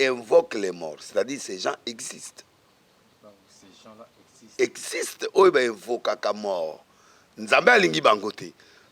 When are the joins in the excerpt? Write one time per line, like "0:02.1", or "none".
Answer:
none